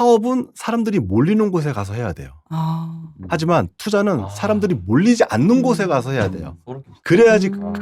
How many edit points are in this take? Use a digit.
0